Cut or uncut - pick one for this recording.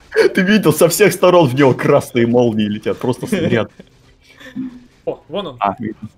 cut